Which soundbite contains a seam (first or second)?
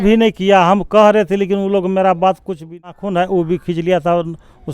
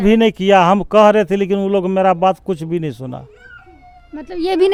first